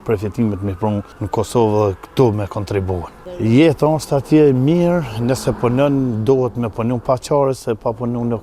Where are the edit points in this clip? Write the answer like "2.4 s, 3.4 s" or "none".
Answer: 1.2 s, 3.2 s